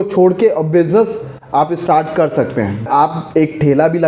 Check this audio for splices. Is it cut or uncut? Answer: cut